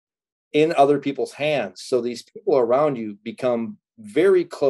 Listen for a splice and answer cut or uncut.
uncut